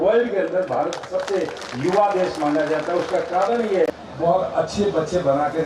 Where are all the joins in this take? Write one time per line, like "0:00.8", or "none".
0:03.9